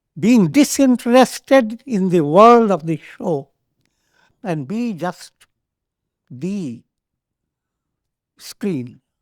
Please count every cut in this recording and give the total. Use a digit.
1